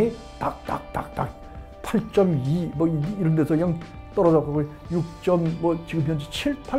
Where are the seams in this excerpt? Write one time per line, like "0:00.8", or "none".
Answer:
none